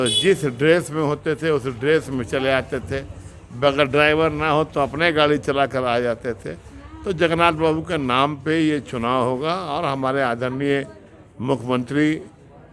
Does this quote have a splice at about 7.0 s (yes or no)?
no